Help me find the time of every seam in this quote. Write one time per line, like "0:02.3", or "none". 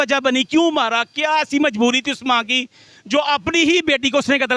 none